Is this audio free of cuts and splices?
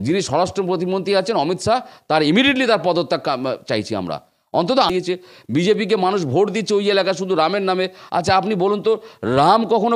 no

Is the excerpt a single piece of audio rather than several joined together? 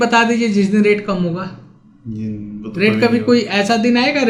yes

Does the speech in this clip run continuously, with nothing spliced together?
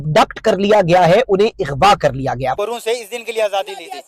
no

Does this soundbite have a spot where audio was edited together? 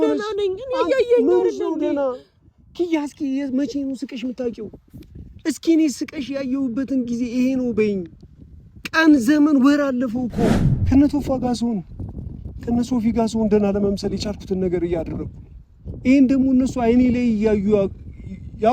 yes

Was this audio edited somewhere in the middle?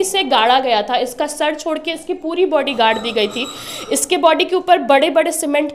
no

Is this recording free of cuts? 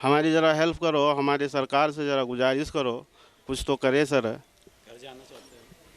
yes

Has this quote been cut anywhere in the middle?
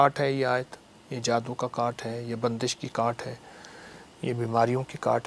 no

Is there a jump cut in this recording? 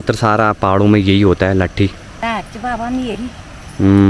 yes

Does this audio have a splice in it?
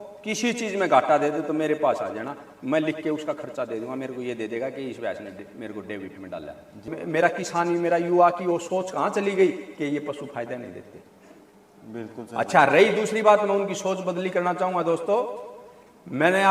yes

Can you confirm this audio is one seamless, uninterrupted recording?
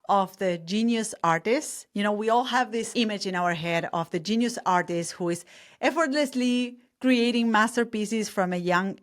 no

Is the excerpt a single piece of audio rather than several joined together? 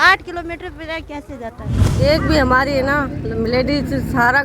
no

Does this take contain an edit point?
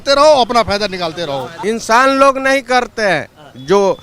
yes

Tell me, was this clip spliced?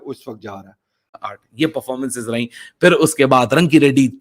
yes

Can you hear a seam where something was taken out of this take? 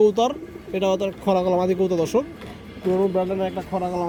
no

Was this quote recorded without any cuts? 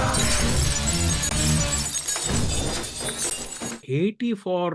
no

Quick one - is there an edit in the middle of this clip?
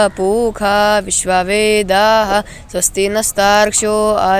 no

